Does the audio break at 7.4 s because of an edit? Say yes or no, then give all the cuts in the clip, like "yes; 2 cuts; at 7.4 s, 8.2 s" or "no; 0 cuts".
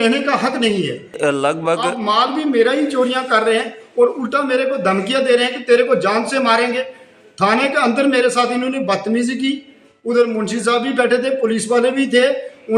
no; 1 cut; at 1.2 s